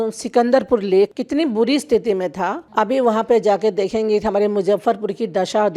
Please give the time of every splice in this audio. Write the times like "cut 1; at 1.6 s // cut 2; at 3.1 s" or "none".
cut 1; at 1.2 s // cut 2; at 2.6 s